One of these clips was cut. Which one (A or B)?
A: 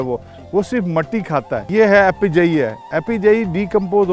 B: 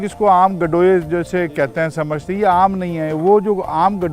A